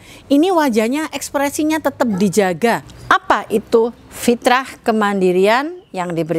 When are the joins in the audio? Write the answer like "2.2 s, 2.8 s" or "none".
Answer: 2.9 s